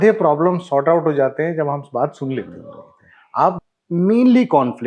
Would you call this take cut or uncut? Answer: cut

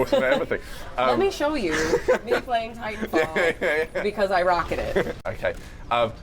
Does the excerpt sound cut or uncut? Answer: cut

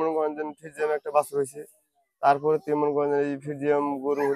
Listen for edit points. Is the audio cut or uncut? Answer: uncut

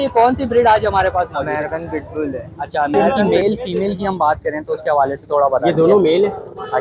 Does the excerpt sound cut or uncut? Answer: cut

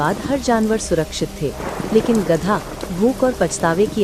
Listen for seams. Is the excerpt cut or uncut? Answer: uncut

